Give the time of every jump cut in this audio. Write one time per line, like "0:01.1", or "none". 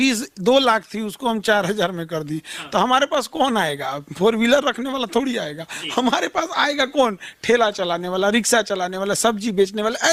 none